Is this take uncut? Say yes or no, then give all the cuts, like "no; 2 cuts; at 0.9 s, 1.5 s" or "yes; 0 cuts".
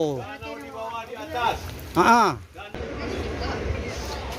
no; 1 cut; at 2.6 s